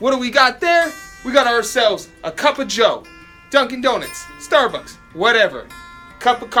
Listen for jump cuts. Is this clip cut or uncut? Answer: uncut